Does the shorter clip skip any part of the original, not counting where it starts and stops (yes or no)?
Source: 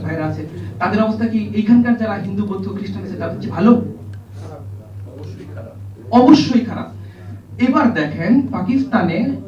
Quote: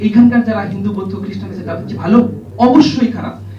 yes